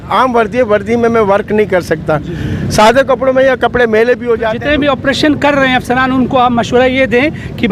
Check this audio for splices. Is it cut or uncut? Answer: uncut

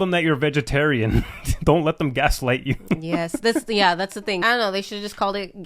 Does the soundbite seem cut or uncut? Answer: cut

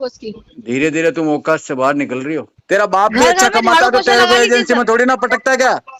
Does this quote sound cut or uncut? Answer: cut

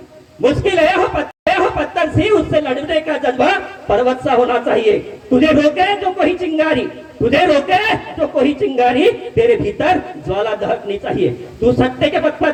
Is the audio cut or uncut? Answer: uncut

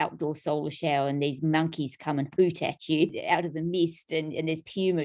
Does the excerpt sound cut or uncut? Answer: cut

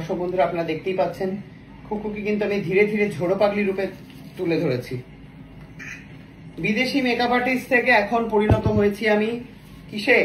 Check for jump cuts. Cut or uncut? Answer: uncut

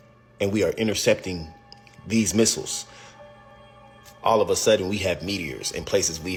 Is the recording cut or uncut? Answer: uncut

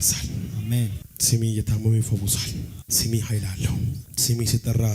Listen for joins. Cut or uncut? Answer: cut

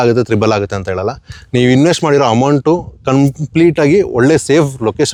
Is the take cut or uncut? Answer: uncut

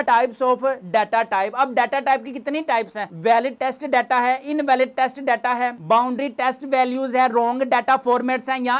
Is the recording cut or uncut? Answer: uncut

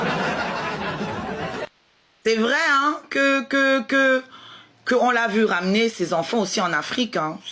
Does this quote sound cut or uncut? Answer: cut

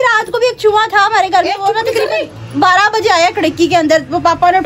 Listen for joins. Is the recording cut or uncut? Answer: uncut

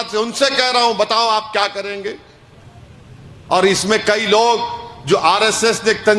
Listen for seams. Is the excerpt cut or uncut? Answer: uncut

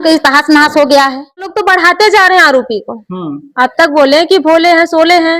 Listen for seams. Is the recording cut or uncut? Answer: cut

